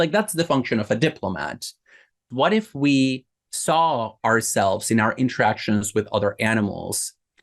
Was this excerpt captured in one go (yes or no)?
no